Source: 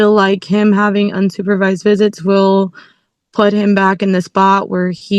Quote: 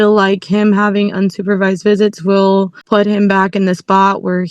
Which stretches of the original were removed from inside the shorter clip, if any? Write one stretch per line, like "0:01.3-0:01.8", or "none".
0:02.8-0:03.2